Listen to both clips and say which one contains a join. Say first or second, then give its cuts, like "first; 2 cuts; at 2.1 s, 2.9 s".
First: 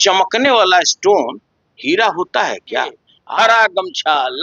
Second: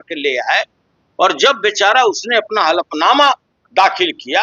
first; 1 cut; at 3.1 s